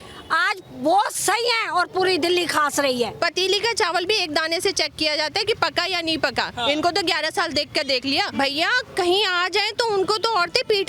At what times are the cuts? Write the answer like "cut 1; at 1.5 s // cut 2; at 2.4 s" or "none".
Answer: cut 1; at 3.1 s // cut 2; at 8.3 s